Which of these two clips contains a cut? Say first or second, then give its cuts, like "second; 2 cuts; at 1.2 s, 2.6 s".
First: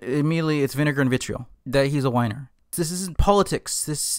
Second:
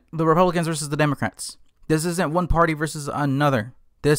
first; 1 cut; at 2.7 s